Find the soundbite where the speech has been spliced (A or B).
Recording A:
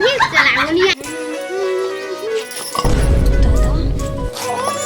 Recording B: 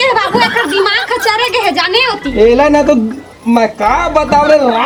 A